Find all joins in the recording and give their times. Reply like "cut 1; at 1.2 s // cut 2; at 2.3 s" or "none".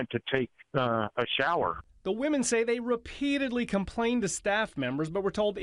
cut 1; at 1.9 s